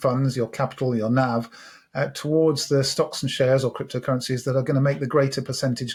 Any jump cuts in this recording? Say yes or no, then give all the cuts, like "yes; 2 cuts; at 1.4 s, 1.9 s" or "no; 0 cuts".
no; 0 cuts